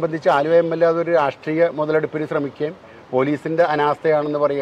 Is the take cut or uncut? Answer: uncut